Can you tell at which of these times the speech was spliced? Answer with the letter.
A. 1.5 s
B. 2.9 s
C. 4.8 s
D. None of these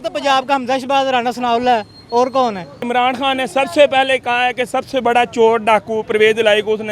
B